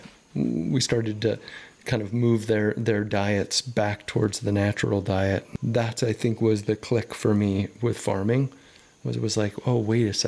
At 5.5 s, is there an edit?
yes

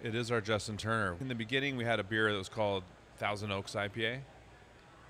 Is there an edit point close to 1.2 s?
yes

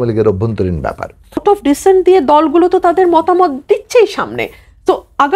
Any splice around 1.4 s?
yes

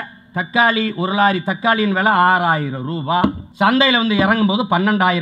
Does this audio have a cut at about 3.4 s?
yes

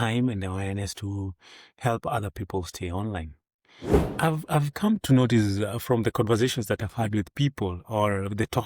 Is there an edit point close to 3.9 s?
yes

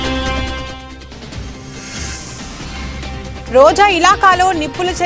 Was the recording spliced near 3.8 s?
no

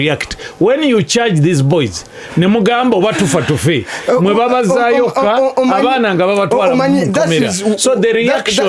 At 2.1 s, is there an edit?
no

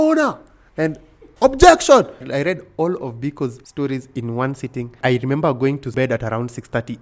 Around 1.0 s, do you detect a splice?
no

